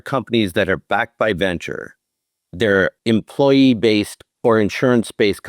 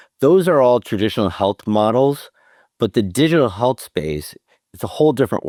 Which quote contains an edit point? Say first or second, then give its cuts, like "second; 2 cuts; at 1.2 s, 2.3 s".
first; 2 cuts; at 2.9 s, 4.2 s